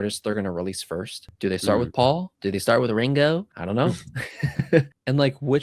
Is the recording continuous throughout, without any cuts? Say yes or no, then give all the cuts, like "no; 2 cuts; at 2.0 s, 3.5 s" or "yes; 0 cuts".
no; 3 cuts; at 1.2 s, 2.3 s, 3.5 s